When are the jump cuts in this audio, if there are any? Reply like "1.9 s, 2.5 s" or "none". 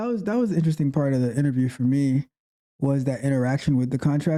none